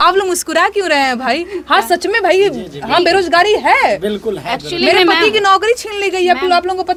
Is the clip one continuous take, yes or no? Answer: yes